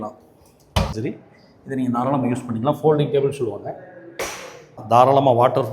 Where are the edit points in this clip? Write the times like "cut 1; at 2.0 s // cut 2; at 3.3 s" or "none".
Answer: cut 1; at 1.0 s // cut 2; at 4.8 s